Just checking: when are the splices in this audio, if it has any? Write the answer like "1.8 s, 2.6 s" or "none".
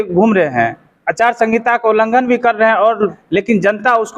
3.2 s